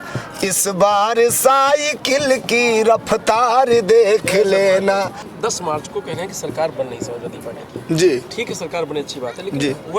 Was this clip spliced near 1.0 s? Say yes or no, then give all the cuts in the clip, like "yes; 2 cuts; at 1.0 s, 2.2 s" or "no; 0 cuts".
no; 1 cut; at 5.2 s